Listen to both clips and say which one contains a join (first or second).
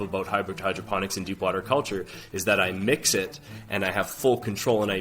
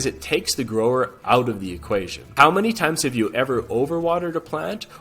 second